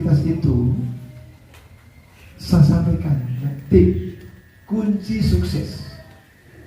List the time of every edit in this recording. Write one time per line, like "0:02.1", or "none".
0:03.5